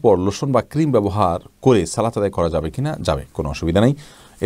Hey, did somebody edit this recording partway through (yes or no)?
no